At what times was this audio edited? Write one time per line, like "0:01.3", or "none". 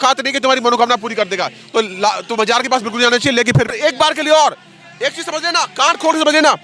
0:03.7